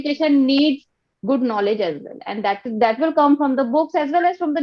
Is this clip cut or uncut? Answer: uncut